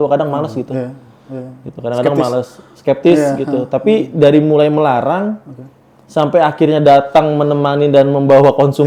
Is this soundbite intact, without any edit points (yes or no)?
yes